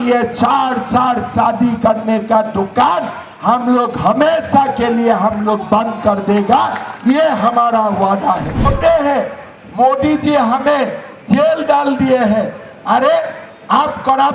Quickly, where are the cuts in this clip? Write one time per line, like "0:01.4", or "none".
0:08.7